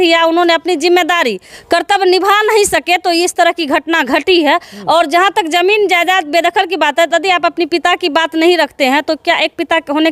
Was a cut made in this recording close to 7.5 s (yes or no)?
no